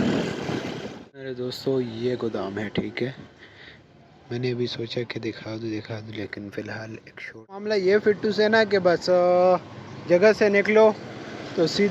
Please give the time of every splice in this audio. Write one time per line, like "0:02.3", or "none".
0:01.3
0:07.7